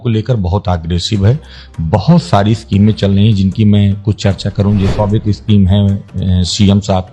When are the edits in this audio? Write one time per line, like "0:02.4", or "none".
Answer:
0:04.9